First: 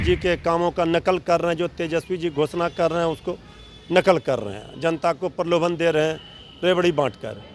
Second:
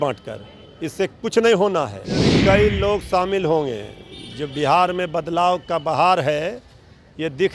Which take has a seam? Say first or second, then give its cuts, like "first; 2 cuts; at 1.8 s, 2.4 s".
second; 1 cut; at 2.3 s